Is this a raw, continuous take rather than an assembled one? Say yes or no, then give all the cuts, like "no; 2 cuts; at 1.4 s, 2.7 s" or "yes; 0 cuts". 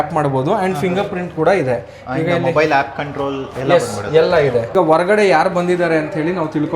no; 1 cut; at 4.7 s